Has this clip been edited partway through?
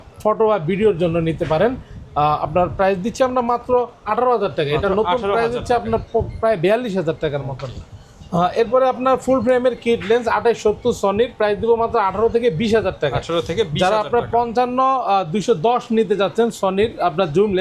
no; 0 cuts

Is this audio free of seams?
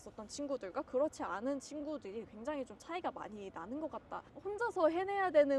no; 1 cut; at 4.3 s

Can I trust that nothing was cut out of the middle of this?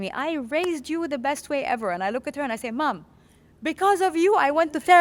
yes; 0 cuts

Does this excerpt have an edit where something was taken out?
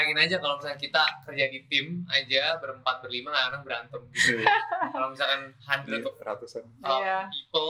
no; 0 cuts

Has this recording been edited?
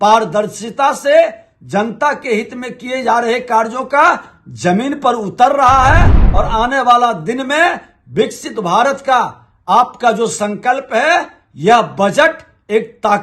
yes; 1 cut; at 6.2 s

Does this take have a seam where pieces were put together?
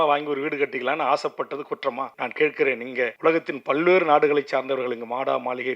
yes; 2 cuts; at 2.2 s, 3.1 s

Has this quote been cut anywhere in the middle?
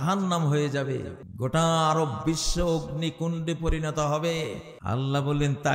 yes; 2 cuts; at 1.2 s, 4.7 s

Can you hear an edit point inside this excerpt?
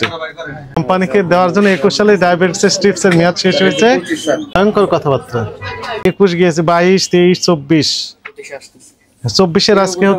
yes; 3 cuts; at 0.7 s, 4.5 s, 6.0 s

